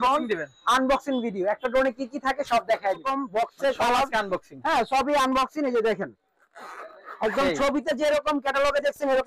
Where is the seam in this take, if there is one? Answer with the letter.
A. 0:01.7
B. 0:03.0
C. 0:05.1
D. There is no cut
B